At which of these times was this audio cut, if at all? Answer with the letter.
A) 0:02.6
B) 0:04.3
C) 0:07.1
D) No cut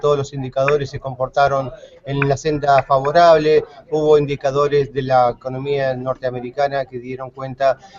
A